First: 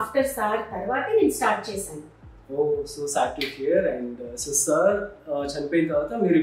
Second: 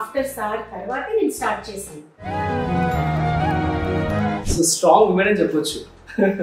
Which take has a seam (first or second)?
second